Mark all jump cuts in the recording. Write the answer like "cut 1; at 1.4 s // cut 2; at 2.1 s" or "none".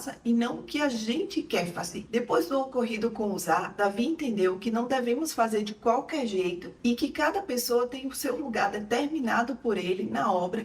none